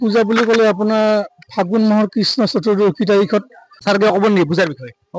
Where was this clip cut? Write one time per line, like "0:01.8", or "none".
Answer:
0:03.7